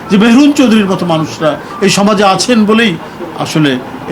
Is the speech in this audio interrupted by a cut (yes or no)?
no